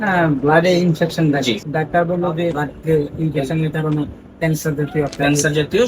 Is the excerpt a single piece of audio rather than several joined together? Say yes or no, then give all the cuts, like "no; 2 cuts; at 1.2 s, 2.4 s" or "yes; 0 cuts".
no; 2 cuts; at 1.6 s, 2.6 s